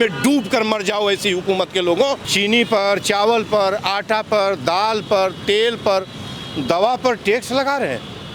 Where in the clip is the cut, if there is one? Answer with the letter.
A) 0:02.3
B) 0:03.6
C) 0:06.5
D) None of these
A